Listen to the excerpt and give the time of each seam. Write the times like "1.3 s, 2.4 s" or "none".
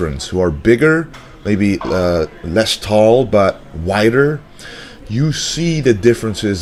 none